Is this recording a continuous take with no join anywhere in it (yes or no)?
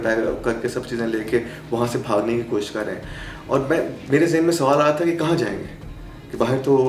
yes